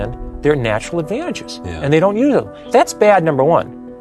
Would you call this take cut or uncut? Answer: cut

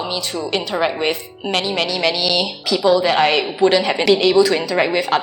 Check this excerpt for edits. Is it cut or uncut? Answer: cut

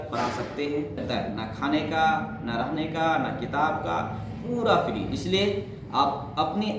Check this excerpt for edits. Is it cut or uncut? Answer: cut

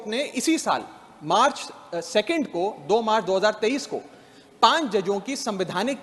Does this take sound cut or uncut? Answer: uncut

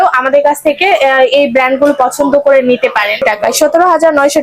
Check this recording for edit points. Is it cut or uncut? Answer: cut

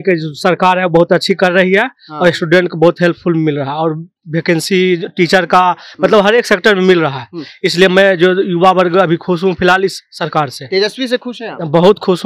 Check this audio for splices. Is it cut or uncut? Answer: uncut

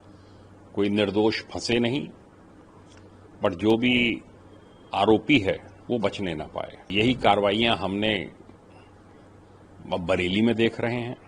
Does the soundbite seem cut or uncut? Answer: cut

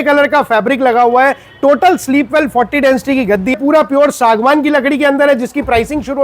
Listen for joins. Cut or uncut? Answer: cut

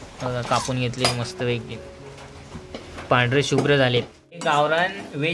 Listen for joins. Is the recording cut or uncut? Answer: cut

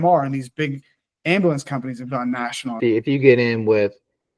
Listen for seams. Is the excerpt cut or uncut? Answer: cut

